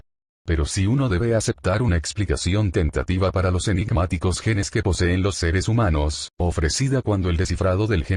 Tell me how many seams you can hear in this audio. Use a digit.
1